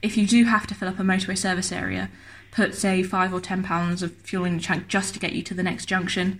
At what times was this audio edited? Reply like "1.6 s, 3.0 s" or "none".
none